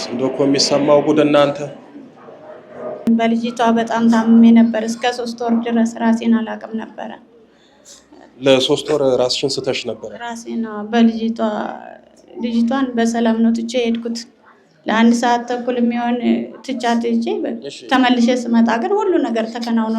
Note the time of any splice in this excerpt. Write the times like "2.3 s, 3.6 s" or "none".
3.1 s